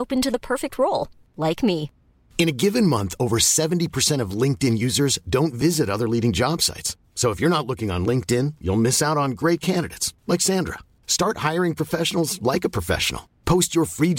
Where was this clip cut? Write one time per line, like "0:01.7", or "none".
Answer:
none